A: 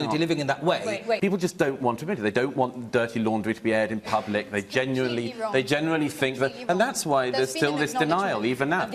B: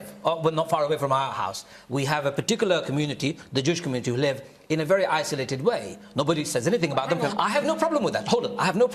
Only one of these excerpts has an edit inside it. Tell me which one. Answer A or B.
A